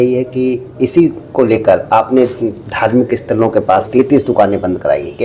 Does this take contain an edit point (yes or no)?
yes